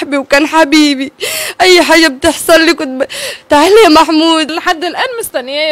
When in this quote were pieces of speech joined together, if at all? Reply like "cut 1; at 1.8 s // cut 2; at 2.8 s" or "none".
cut 1; at 4.5 s